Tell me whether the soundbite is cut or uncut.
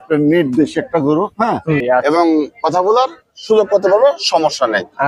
cut